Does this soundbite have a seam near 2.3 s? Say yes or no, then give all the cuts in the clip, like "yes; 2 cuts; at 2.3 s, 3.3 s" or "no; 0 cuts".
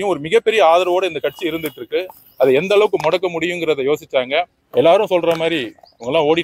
no; 1 cut; at 4.6 s